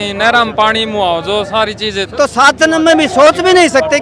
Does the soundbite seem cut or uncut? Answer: cut